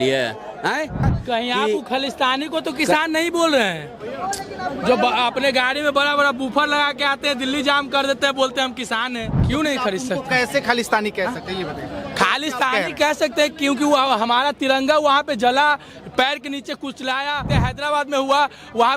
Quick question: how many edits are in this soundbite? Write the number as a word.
three